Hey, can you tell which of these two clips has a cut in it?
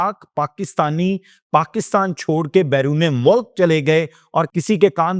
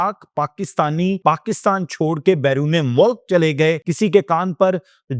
second; 2 cuts; at 1.2 s, 3.9 s

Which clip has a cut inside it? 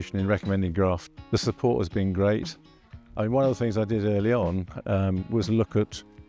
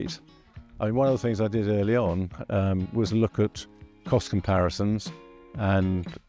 first; 1 cut; at 1.1 s

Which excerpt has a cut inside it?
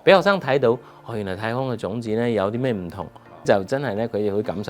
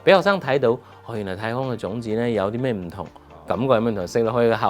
first; 1 cut; at 3.4 s

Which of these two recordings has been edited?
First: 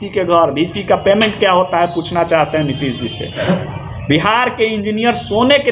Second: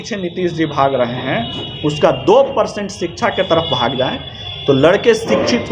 first; 1 cut; at 3.4 s

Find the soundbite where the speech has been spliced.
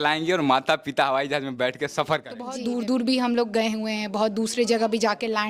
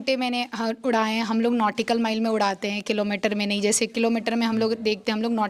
first; 1 cut; at 2.6 s

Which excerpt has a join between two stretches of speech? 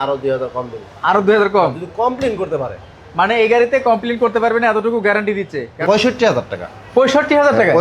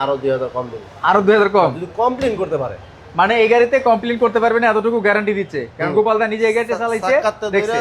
first; 1 cut; at 5.8 s

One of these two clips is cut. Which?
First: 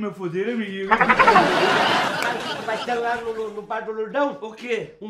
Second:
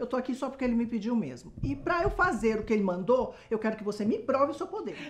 first; 1 cut; at 2.1 s

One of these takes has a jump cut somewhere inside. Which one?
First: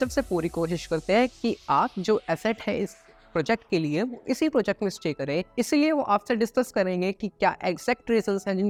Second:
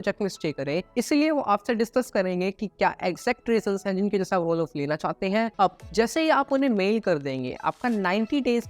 second; 1 cut; at 5.5 s

